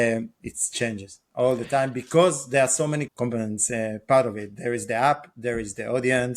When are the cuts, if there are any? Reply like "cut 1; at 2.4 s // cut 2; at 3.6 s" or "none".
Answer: cut 1; at 3.1 s